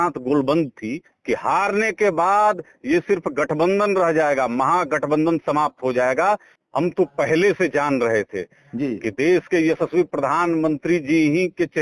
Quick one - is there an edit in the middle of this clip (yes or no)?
yes